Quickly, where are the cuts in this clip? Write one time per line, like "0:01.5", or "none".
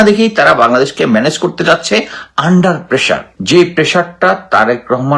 0:03.3